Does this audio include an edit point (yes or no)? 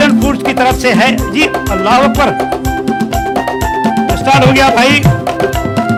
no